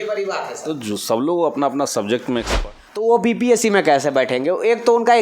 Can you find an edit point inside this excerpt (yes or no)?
yes